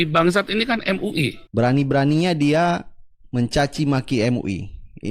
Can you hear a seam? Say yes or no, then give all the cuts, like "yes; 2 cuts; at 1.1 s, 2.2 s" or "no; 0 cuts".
yes; 1 cut; at 1.4 s